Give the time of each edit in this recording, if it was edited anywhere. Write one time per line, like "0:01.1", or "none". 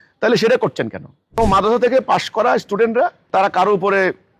0:01.4
0:03.2